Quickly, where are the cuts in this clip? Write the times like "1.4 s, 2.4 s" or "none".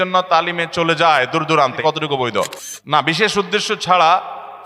1.8 s, 2.7 s